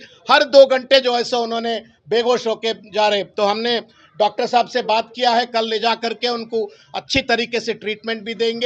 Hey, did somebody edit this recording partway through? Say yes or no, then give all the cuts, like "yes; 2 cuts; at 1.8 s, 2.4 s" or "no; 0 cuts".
no; 0 cuts